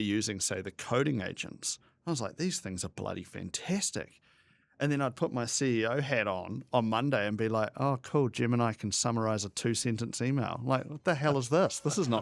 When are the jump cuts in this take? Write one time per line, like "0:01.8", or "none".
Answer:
none